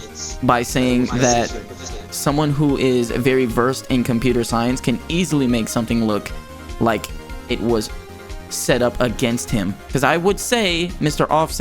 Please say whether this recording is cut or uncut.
cut